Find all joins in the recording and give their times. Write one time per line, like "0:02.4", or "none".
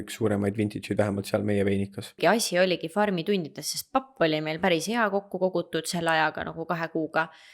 0:02.2